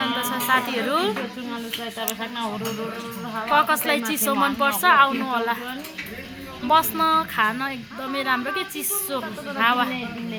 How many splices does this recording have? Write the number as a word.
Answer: zero